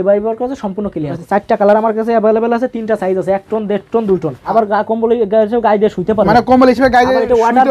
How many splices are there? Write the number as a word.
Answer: two